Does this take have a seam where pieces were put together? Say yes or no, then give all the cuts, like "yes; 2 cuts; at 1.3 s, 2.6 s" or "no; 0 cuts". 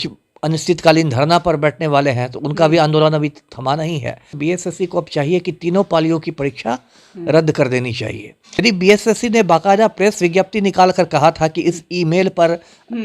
yes; 2 cuts; at 4.3 s, 8.6 s